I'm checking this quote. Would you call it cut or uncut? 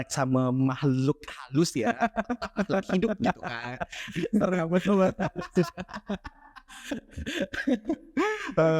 uncut